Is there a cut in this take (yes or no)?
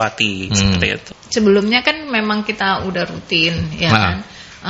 yes